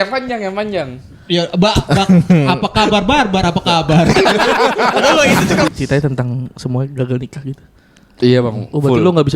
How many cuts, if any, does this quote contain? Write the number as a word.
one